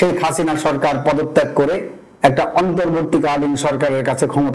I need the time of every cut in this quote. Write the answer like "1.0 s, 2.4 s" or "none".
none